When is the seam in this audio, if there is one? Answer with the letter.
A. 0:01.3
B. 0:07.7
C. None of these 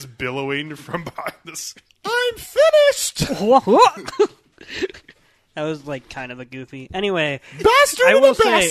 C